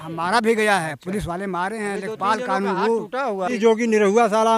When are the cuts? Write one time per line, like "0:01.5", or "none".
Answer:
0:03.5